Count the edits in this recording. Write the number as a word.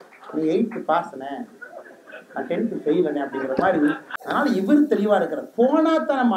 one